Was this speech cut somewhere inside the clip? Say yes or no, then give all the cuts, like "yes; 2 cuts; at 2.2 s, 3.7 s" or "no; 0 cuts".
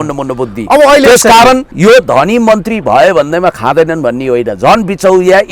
yes; 1 cut; at 1.7 s